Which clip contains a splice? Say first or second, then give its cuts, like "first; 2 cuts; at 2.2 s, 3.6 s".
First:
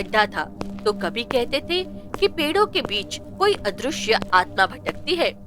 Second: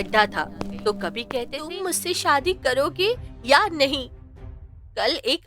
second; 1 cut; at 1.6 s